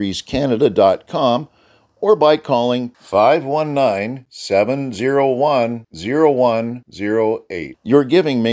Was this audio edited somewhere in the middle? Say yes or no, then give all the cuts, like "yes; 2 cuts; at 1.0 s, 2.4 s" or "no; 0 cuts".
no; 0 cuts